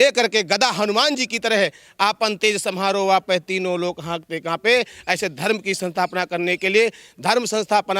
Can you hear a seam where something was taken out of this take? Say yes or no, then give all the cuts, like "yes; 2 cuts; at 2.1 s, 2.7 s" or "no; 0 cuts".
no; 0 cuts